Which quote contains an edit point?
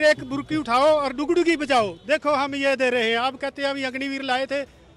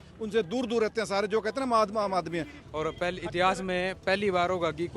second; 1 cut; at 2.5 s

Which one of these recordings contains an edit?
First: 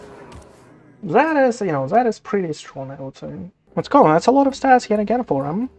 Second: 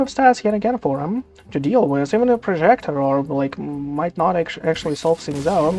first; 1 cut; at 3.5 s

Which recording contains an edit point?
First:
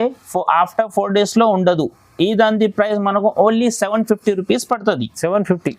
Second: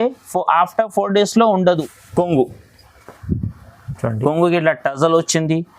second; 1 cut; at 2.0 s

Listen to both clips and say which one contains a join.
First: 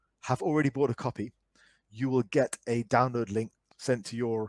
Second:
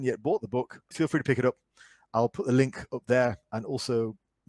first; 1 cut; at 3.6 s

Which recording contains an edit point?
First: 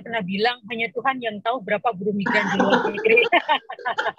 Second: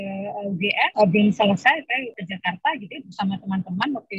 second; 2 cuts; at 0.9 s, 2.1 s

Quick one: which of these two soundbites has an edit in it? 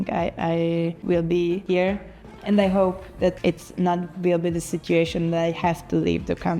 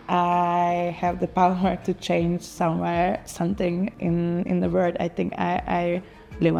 first; 3 cuts; at 1.0 s, 2.0 s, 3.4 s

